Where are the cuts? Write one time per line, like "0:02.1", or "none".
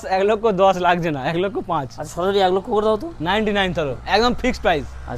none